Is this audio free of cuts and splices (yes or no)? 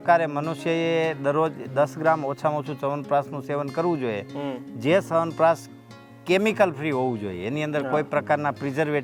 yes